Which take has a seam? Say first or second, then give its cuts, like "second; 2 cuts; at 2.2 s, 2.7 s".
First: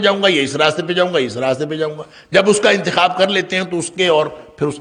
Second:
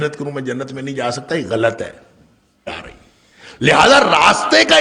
second; 1 cut; at 2.7 s